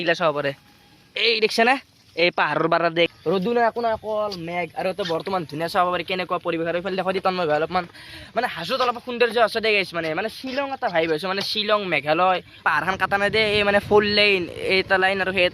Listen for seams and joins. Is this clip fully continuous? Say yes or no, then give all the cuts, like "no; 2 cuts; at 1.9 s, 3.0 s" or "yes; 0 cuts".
no; 2 cuts; at 3.1 s, 12.6 s